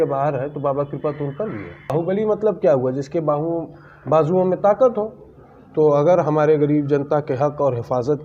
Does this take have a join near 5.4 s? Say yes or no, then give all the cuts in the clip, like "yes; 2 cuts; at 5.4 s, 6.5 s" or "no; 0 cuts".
no; 1 cut; at 1.9 s